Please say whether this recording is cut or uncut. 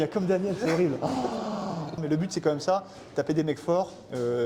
cut